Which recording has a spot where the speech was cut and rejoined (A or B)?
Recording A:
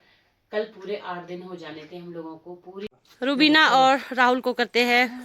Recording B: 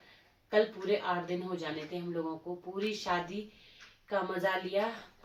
A